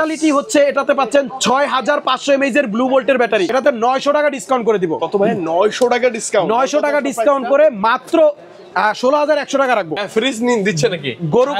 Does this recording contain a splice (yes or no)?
yes